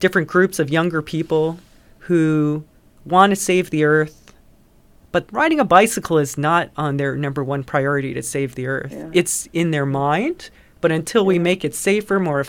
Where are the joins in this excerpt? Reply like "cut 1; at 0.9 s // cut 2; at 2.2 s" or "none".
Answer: none